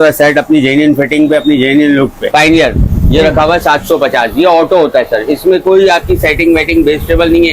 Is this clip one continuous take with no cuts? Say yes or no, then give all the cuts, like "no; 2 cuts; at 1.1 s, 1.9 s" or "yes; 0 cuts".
no; 1 cut; at 2.2 s